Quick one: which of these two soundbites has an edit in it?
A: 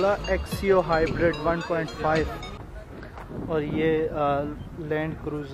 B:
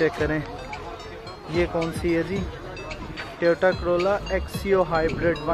A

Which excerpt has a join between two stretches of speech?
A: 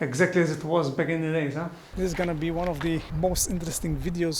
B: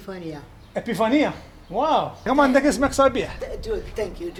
A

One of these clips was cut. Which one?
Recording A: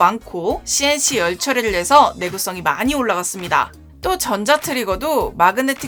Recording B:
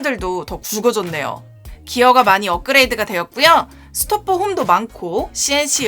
B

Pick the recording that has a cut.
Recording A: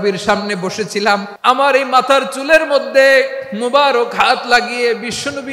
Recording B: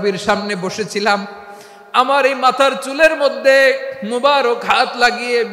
A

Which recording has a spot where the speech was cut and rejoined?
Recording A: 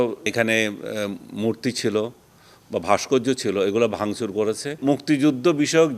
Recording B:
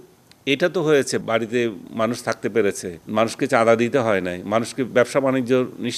A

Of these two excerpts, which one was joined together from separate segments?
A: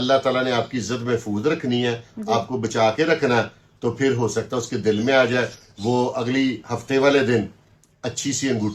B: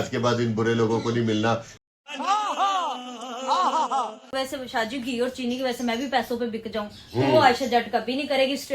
B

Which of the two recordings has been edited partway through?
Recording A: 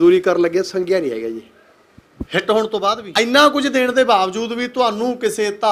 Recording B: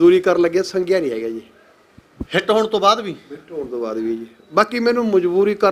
A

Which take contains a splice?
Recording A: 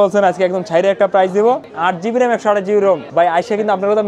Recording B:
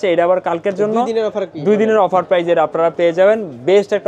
A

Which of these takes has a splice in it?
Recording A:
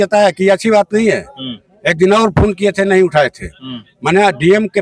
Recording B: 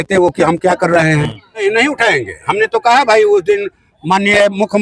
B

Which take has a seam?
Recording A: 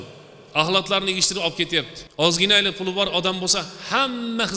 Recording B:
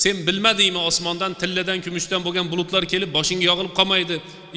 A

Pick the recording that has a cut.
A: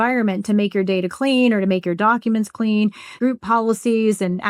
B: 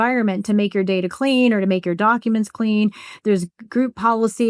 A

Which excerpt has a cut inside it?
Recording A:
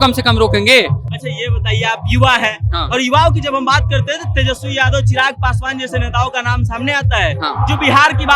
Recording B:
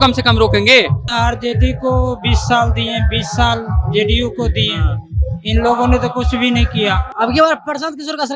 B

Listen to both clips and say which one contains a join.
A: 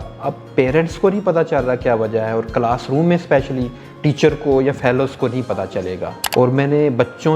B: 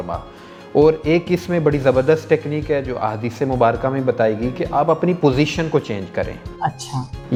A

